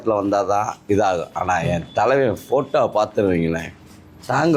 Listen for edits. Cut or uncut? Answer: uncut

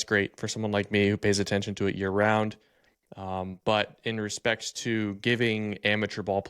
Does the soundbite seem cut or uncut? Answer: uncut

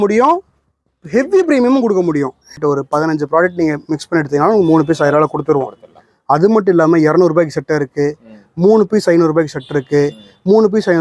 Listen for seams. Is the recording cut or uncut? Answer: cut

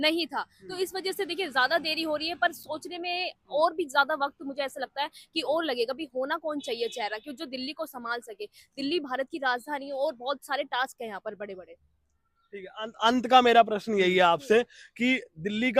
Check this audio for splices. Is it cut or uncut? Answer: uncut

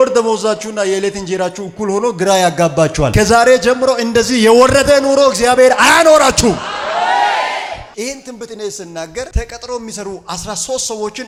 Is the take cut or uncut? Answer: uncut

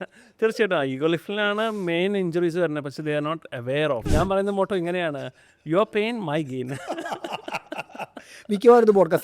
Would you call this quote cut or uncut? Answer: cut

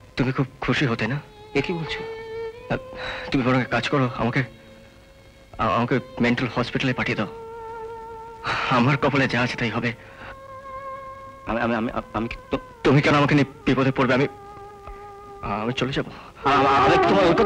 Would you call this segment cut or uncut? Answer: uncut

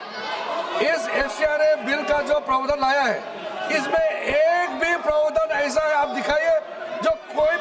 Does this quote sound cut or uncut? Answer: uncut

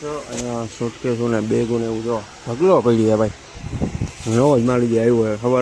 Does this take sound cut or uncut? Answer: uncut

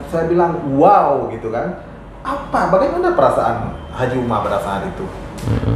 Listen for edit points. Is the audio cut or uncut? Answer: uncut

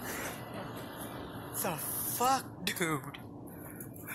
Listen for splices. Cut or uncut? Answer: cut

